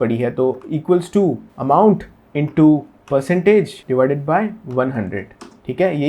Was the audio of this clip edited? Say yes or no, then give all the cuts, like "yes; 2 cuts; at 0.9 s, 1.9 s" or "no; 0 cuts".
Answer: yes; 2 cuts; at 1.5 s, 3.8 s